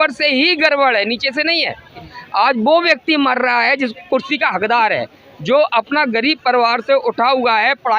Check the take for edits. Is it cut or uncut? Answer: cut